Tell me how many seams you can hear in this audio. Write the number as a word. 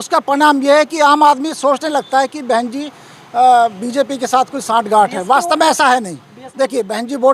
one